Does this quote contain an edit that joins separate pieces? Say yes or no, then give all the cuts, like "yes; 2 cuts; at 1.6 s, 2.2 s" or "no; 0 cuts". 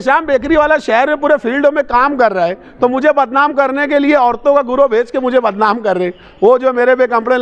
no; 0 cuts